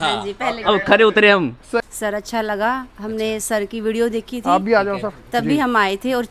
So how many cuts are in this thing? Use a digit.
1